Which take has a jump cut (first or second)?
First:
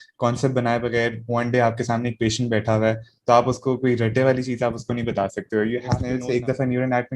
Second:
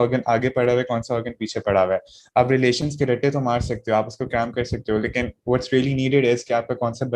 first